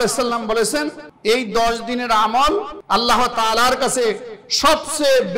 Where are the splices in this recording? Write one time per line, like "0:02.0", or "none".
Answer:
0:01.0
0:02.8